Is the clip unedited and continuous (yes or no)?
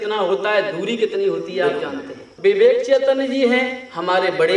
no